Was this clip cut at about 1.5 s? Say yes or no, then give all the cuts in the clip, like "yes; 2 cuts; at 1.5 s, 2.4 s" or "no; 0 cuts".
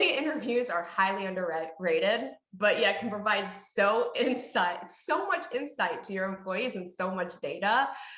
no; 0 cuts